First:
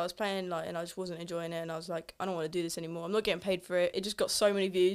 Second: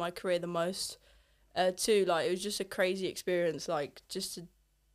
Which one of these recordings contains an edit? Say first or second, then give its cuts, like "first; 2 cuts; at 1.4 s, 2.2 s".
first; 1 cut; at 4.0 s